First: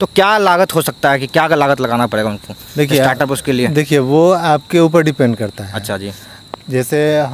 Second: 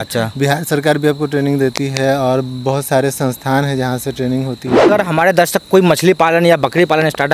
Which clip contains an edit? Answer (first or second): second